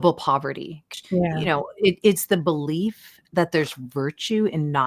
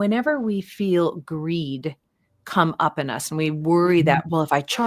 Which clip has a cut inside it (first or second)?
first